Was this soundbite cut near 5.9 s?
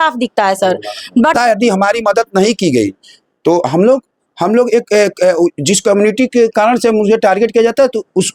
no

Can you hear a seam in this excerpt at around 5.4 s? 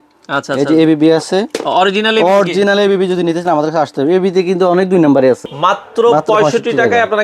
yes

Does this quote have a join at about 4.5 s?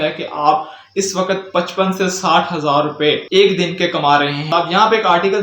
yes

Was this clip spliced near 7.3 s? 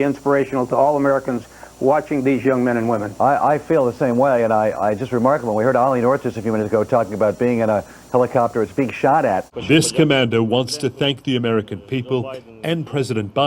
no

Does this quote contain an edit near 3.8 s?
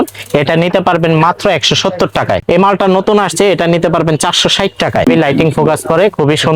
no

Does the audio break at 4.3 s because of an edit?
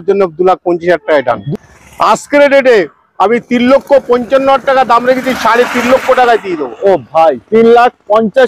no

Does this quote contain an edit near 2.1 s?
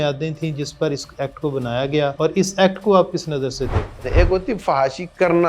yes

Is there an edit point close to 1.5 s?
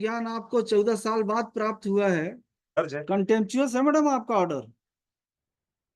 no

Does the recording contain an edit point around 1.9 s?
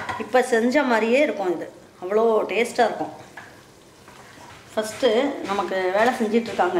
no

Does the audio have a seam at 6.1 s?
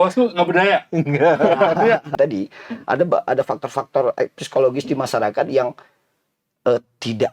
no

